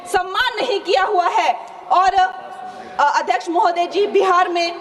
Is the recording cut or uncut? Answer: uncut